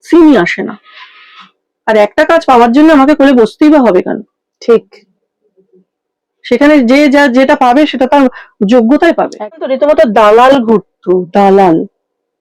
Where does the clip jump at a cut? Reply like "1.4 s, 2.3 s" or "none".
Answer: 9.6 s